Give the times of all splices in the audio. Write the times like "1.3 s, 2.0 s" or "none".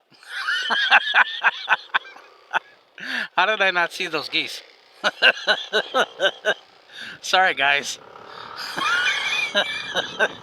none